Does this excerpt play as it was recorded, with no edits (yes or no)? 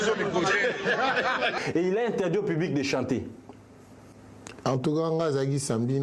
no